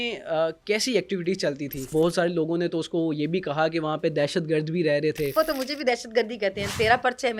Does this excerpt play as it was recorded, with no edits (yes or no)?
no